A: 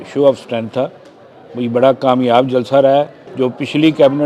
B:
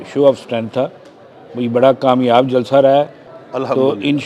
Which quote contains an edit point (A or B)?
A